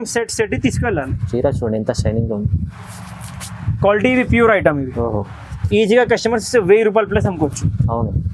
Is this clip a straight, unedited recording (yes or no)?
yes